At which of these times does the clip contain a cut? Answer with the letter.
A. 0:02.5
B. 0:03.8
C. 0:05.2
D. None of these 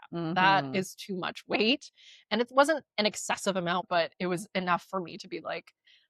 B